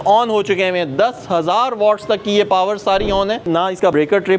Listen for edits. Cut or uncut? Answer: cut